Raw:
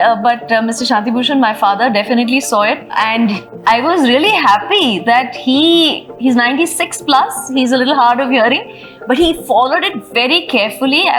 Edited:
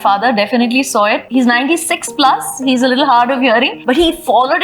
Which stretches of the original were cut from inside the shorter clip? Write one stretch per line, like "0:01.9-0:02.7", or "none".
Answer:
0:02.8-0:06.1
0:08.6-0:09.0